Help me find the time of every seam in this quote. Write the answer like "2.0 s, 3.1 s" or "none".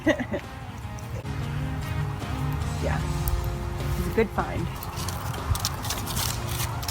1.1 s